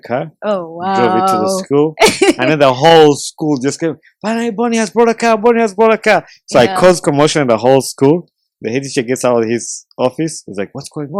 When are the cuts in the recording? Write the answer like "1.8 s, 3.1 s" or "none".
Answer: none